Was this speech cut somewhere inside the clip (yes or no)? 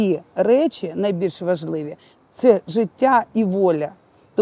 no